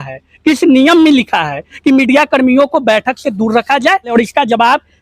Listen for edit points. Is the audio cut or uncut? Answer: cut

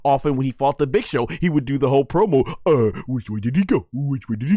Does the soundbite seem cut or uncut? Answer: uncut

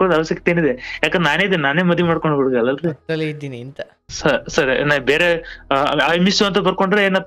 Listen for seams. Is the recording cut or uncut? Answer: cut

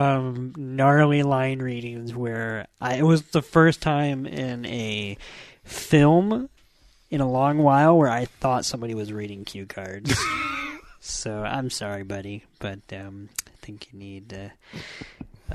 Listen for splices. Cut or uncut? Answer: uncut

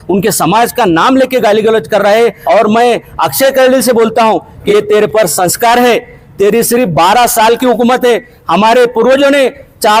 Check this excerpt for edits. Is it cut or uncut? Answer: cut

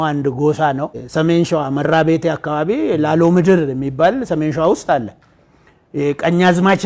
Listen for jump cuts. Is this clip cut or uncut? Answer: cut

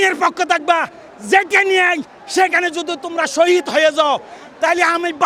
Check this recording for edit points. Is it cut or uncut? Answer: uncut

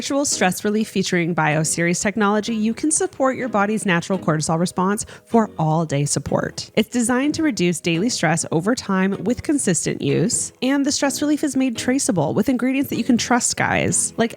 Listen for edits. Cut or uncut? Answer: cut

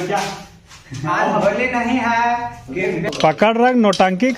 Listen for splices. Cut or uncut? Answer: cut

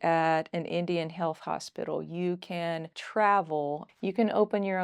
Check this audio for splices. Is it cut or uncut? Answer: cut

